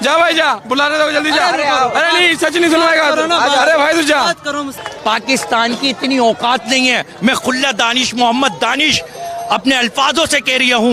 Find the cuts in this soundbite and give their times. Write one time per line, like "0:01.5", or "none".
0:04.8